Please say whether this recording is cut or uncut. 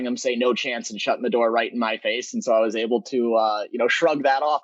uncut